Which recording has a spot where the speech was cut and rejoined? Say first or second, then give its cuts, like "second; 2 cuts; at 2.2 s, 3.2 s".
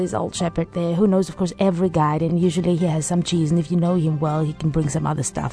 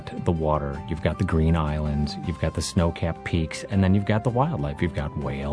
first; 1 cut; at 2.3 s